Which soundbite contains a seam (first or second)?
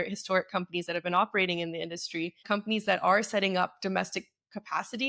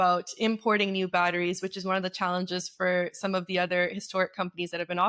first